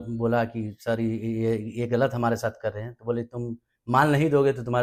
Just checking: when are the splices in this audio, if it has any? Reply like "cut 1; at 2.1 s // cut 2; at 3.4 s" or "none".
none